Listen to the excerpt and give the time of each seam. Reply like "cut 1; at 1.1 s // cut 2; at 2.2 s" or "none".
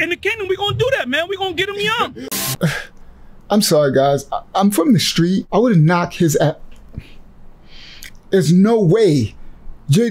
cut 1; at 2.2 s // cut 2; at 5.5 s